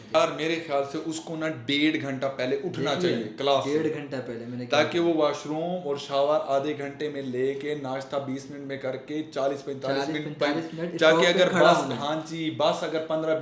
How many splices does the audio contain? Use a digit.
0